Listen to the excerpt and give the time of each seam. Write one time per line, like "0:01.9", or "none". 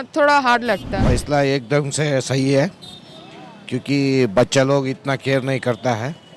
0:00.9